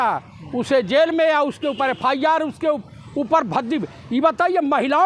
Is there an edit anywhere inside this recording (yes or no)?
no